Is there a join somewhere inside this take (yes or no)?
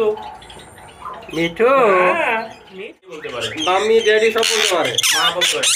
yes